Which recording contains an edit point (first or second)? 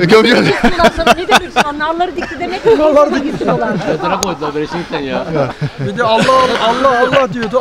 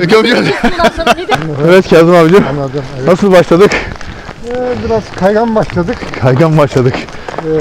second